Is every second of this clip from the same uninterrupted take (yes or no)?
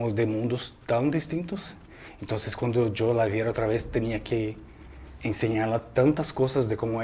yes